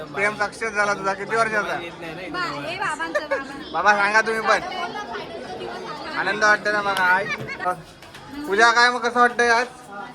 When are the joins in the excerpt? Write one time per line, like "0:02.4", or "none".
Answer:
0:07.7